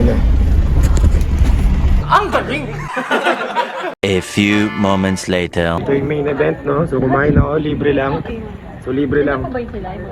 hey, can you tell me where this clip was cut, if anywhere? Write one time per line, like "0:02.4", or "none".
none